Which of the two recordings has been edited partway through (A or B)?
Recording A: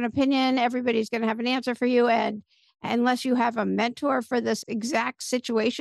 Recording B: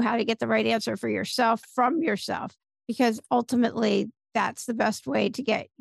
A